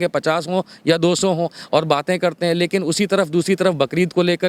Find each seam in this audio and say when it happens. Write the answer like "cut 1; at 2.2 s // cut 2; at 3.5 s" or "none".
none

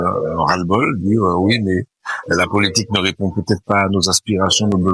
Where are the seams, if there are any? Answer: none

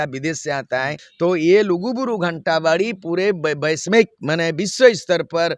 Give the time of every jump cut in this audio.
cut 1; at 1.0 s

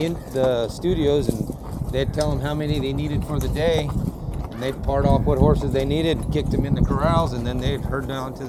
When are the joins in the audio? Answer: none

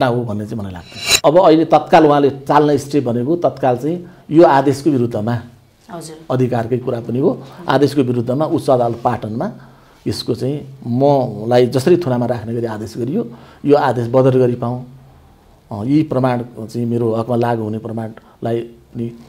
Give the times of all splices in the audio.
cut 1; at 1.0 s

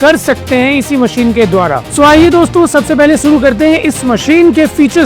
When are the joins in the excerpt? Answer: cut 1; at 1.8 s

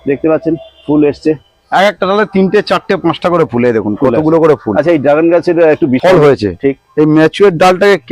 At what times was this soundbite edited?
cut 1; at 6.0 s

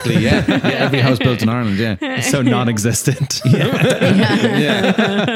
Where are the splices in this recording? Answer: cut 1; at 2.3 s

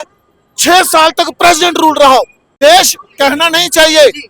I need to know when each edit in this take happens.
cut 1; at 2.4 s

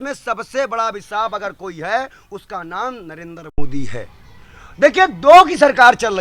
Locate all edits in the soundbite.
none

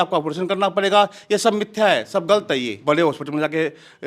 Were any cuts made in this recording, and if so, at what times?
cut 1; at 2.7 s

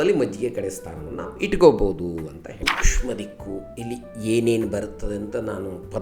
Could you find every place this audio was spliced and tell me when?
cut 1; at 2.7 s

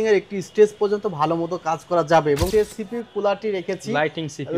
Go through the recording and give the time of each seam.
cut 1; at 2.5 s

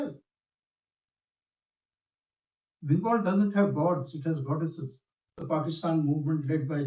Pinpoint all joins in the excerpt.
cut 1; at 5.4 s

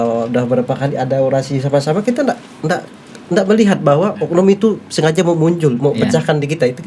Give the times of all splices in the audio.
none

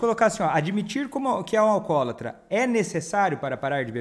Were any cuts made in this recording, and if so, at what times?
none

